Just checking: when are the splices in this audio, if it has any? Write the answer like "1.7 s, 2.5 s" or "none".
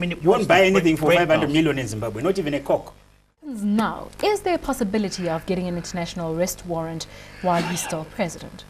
3.4 s